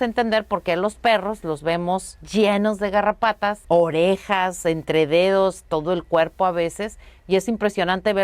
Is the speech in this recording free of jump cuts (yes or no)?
no